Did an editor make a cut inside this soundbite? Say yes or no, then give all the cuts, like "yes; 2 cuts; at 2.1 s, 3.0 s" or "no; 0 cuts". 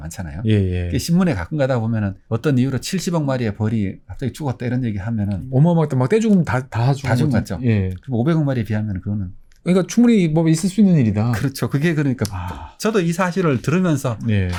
no; 0 cuts